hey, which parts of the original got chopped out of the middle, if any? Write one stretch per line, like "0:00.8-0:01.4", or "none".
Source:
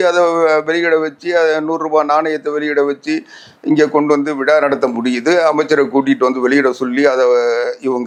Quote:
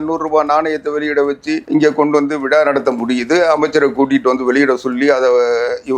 0:03.2-0:03.6